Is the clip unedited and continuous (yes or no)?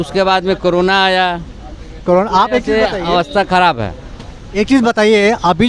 yes